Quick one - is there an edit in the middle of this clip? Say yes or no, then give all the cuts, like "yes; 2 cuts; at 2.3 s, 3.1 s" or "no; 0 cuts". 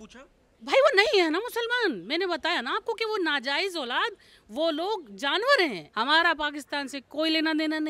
yes; 1 cut; at 5.8 s